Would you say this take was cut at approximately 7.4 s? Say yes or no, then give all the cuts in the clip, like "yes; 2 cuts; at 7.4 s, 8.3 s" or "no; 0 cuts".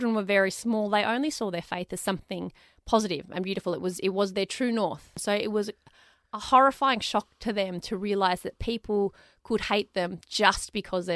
no; 1 cut; at 5.1 s